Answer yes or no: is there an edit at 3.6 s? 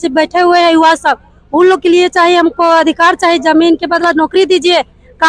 no